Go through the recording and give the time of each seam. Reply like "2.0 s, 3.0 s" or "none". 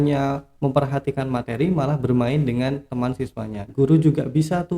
3.6 s